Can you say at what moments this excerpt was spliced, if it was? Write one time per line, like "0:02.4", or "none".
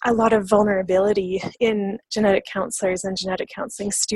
0:02.0